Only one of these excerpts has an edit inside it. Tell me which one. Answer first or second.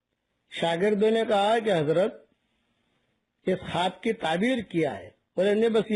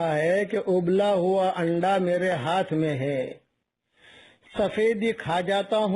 first